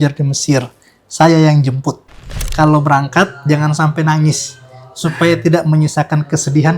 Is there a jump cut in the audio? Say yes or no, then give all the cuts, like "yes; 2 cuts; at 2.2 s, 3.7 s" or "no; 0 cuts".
yes; 1 cut; at 2.4 s